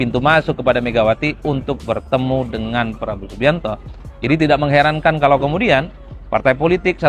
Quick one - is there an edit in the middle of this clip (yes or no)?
no